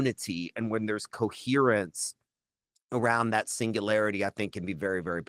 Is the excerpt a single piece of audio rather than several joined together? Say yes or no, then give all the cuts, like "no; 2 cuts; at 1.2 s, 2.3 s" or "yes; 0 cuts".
yes; 0 cuts